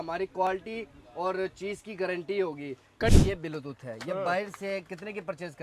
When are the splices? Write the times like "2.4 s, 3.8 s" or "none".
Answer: 3.1 s